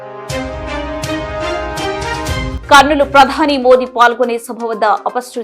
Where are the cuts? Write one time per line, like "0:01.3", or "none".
0:02.5